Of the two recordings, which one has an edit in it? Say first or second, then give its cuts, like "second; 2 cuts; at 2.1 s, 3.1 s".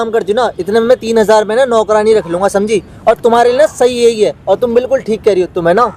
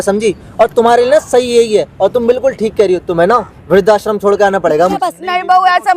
second; 1 cut; at 5.0 s